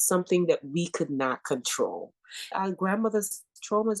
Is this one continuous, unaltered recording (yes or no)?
no